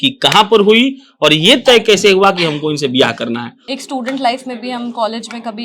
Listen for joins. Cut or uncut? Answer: cut